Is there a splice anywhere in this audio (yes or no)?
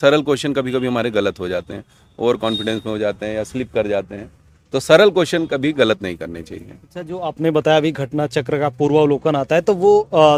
no